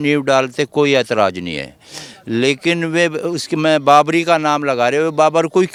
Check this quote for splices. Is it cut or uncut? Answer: uncut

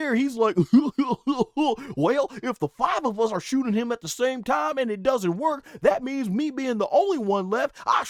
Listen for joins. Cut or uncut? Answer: uncut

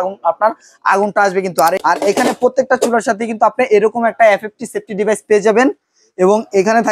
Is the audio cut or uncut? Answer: cut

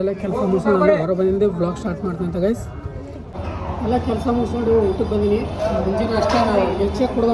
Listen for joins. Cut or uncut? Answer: cut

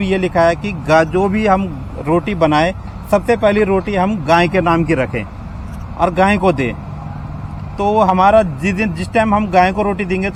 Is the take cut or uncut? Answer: uncut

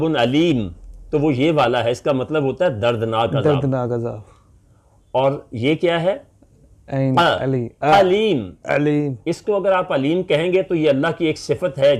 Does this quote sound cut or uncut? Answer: uncut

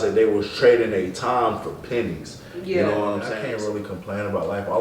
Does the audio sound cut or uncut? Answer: cut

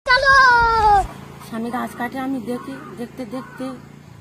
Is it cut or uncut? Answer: cut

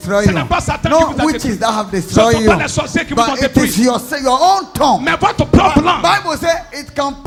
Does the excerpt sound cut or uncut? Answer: uncut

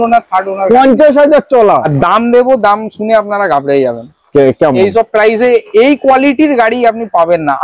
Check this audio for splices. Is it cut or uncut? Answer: cut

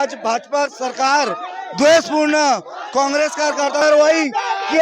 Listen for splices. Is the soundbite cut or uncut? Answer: cut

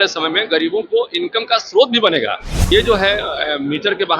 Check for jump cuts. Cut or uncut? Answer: cut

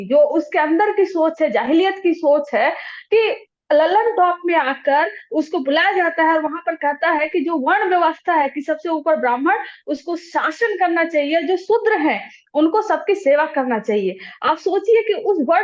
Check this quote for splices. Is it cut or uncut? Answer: uncut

